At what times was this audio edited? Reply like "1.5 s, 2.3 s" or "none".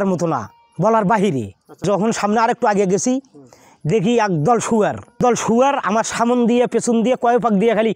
1.8 s, 5.2 s